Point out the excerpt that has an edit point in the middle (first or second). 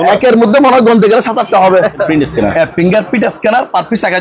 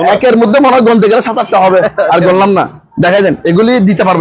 first